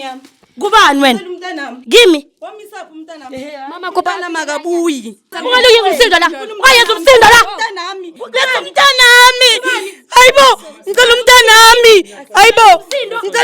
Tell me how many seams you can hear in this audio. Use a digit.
2